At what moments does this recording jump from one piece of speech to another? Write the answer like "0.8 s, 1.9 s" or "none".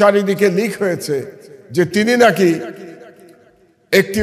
none